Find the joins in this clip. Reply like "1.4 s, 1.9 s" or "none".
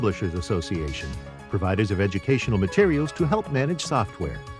none